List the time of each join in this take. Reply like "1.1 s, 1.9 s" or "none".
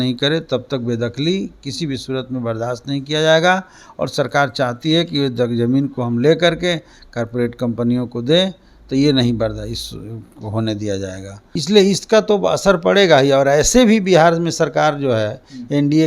11.3 s